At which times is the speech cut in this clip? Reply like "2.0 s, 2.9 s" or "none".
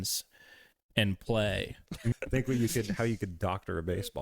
2.1 s